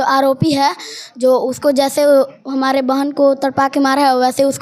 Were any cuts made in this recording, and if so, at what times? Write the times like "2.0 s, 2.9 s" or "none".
none